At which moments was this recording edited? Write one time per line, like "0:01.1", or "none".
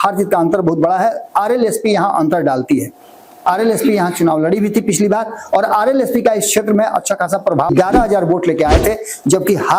0:07.7

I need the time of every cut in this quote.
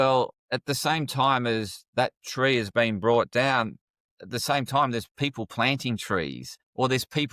none

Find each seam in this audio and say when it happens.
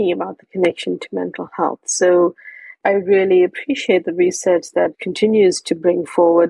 0:02.8
0:05.0

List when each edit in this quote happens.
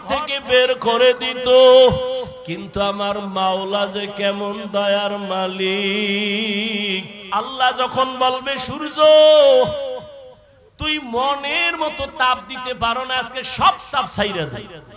0:07.1

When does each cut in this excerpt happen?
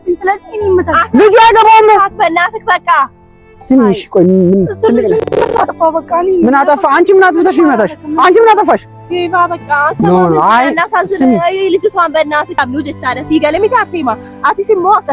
0:12.5

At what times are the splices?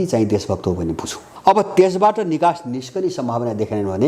0:01.2

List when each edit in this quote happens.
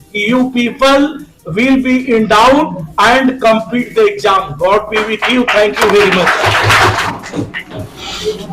0:07.0

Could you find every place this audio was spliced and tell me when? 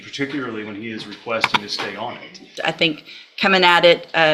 0:02.5

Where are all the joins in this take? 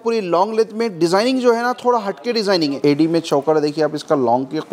0:02.8

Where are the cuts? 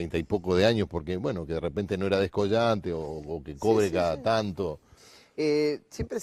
0:01.4

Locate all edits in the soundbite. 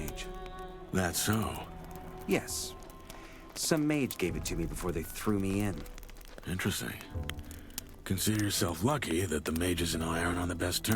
none

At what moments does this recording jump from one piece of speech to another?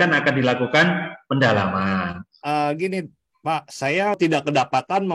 0:02.2
0:04.2

